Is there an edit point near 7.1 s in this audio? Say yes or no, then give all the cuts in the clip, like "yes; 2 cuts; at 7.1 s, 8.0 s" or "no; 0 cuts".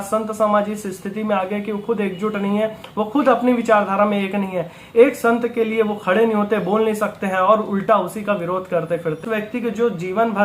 no; 1 cut; at 9.2 s